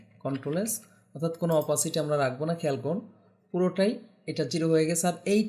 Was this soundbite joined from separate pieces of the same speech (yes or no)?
no